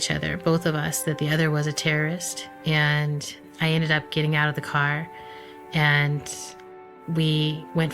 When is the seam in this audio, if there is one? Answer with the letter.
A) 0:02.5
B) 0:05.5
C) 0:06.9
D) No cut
C